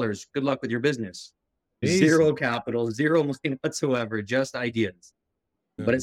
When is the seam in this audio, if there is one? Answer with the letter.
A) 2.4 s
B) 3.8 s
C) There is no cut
C